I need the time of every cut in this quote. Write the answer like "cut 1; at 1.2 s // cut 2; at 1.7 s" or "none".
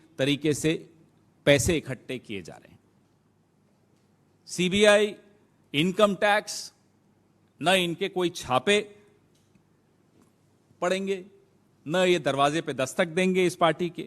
cut 1; at 3.4 s